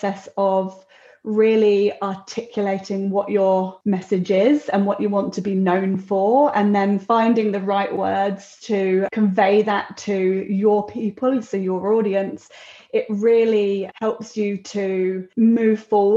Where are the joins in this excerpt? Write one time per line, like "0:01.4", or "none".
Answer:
0:03.7
0:09.1
0:13.9
0:15.3

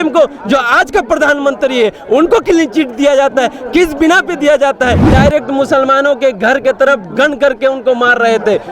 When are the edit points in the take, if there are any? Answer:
0:05.1

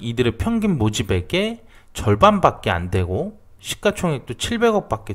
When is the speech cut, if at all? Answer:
none

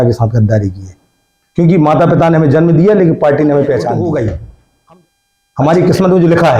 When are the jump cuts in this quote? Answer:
0:03.9

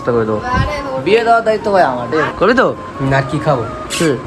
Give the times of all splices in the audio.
0:02.3

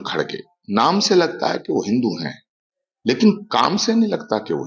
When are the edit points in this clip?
none

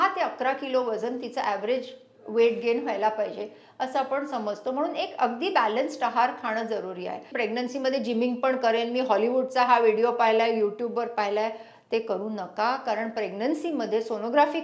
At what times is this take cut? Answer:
0:07.3

